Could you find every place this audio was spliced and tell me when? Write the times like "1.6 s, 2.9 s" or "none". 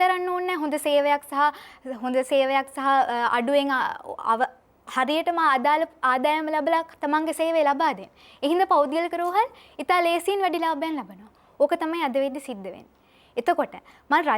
none